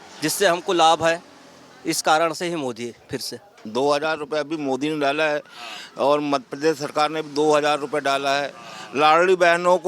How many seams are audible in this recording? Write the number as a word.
one